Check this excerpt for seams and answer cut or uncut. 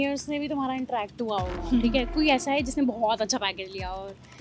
uncut